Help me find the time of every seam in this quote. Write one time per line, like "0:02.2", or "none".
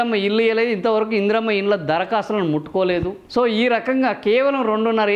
0:03.2